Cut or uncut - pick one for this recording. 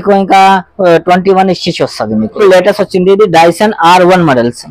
cut